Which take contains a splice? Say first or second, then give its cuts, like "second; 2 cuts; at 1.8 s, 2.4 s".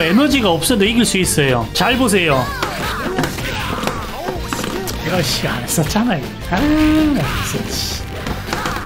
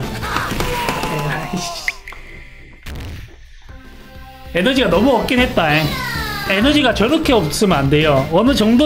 first; 1 cut; at 1.7 s